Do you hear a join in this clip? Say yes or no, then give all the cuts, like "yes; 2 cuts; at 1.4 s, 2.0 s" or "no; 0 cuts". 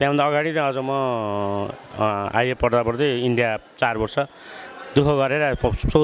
no; 0 cuts